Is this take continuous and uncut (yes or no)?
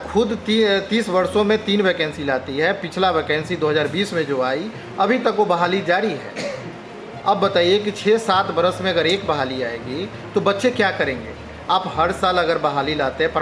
yes